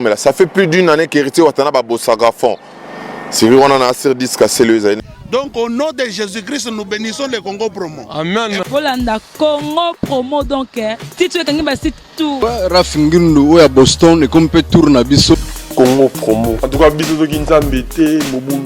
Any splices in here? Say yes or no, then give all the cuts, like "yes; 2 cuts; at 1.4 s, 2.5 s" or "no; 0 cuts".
yes; 3 cuts; at 5.0 s, 12.4 s, 15.6 s